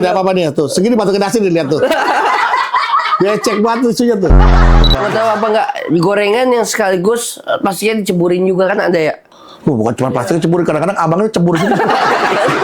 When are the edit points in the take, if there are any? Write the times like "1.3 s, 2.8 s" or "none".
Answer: 4.6 s